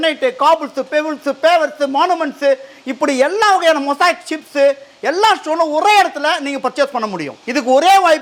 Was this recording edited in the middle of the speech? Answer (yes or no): no